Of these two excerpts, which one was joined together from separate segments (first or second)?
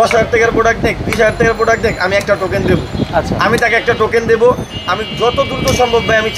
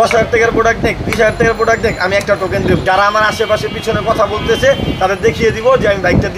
second